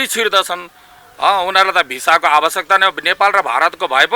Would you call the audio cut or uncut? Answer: uncut